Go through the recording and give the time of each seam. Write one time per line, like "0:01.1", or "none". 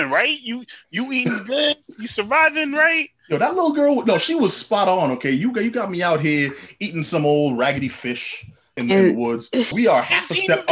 0:08.8
0:09.7